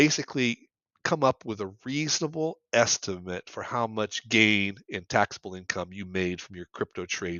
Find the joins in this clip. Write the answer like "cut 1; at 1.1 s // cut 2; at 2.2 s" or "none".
none

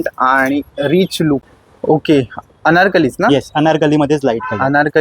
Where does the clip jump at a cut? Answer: cut 1; at 1.5 s

